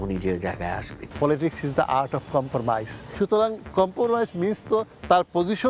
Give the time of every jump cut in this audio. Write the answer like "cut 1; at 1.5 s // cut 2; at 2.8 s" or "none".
cut 1; at 1.0 s // cut 2; at 3.0 s